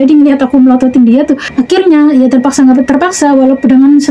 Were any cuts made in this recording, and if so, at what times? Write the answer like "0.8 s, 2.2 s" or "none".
1.5 s